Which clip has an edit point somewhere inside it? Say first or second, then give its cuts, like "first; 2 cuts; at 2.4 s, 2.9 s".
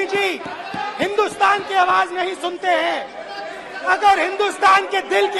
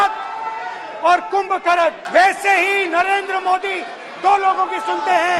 second; 1 cut; at 2.0 s